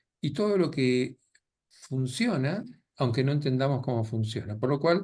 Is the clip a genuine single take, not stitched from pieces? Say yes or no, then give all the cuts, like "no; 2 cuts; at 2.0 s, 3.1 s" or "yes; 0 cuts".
yes; 0 cuts